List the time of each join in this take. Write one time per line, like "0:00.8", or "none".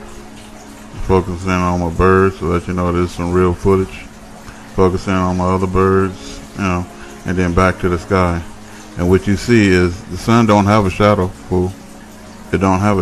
0:04.9